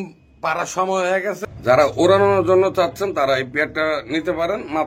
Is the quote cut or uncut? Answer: cut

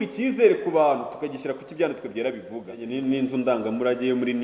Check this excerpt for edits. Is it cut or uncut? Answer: cut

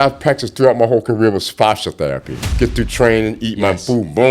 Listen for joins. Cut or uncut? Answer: cut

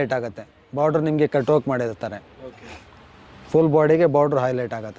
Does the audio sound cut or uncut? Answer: uncut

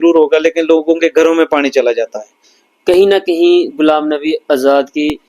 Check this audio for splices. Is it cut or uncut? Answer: cut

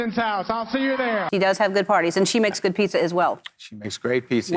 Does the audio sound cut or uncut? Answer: cut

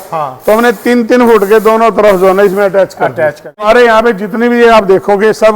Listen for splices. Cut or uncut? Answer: cut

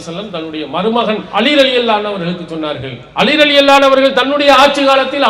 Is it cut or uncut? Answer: cut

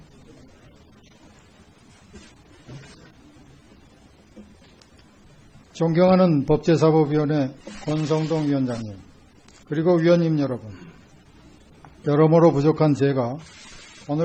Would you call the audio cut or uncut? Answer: uncut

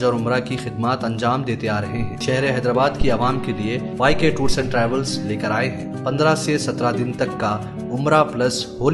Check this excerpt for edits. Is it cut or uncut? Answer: cut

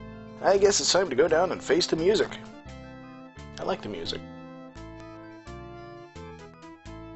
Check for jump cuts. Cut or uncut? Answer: cut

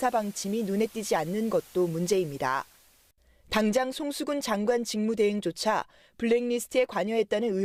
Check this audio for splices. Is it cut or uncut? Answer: uncut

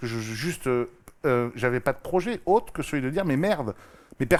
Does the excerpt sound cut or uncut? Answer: uncut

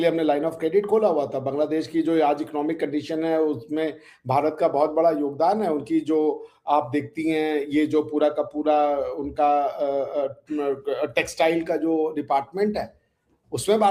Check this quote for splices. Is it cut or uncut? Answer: uncut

